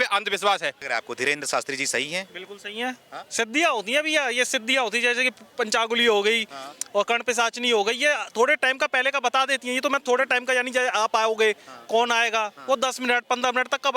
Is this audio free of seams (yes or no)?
yes